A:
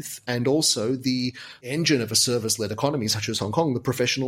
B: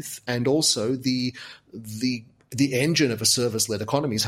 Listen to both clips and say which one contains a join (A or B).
A